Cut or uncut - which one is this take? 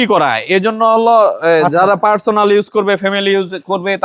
uncut